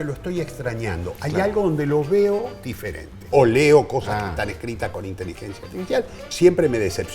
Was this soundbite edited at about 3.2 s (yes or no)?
yes